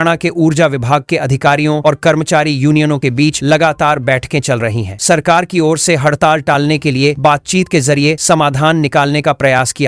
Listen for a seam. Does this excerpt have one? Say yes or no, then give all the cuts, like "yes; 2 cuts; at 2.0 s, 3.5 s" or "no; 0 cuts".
no; 0 cuts